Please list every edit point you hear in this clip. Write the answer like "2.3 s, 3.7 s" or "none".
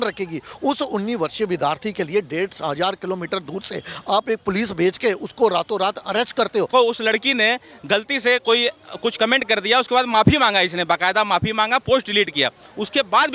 6.7 s